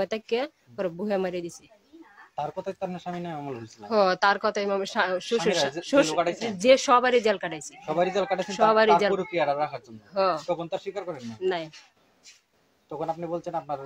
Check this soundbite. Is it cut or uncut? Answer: uncut